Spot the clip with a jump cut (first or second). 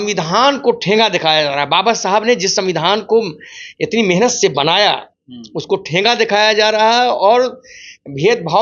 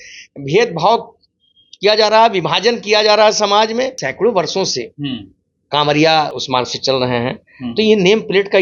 second